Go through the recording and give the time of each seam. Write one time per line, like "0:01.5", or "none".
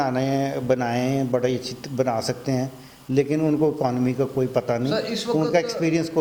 none